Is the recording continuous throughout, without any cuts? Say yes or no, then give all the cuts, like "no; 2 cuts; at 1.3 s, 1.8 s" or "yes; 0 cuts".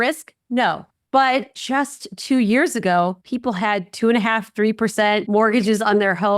no; 4 cuts; at 0.9 s, 1.6 s, 3.3 s, 5.2 s